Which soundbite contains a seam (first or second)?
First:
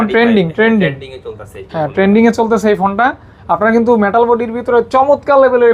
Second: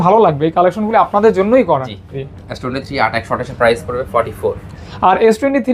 second